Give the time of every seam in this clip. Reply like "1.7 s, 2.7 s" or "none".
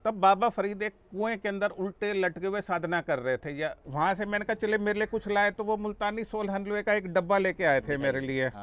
3.8 s